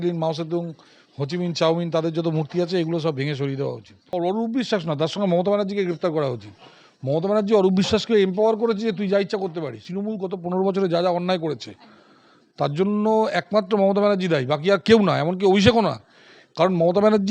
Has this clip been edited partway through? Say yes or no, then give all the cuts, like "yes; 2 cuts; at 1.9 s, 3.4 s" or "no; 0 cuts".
yes; 2 cuts; at 4.1 s, 9.9 s